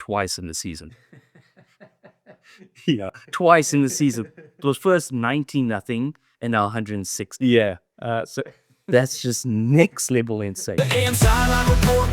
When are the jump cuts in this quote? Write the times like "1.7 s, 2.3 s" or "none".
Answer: 10.6 s